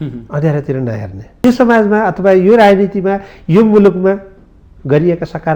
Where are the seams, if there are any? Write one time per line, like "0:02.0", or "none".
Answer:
0:01.4